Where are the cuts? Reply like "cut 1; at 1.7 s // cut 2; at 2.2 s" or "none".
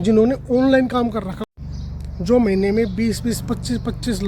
cut 1; at 1.5 s